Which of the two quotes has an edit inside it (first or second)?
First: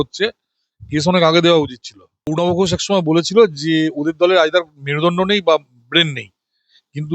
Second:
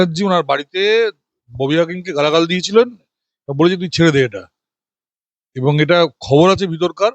first